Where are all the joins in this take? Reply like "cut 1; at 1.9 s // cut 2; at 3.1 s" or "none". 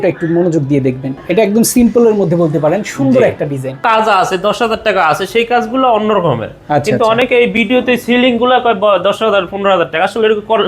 cut 1; at 1.1 s // cut 2; at 3.8 s